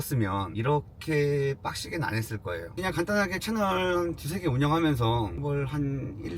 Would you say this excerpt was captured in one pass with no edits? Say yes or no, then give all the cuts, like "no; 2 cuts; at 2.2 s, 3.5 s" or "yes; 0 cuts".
no; 2 cuts; at 2.7 s, 5.4 s